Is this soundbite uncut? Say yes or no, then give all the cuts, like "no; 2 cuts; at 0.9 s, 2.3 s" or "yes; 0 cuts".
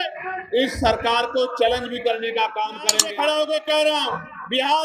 no; 1 cut; at 3.0 s